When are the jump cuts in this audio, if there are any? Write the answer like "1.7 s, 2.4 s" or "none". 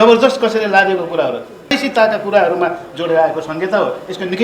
1.8 s